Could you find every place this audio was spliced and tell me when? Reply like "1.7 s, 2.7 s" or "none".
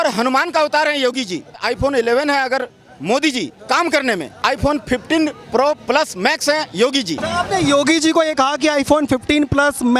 1.6 s, 4.4 s, 7.2 s